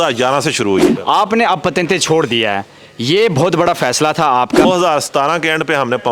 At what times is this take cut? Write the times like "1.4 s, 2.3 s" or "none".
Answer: 0.9 s, 4.6 s